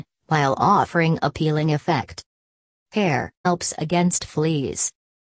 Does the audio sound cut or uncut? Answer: uncut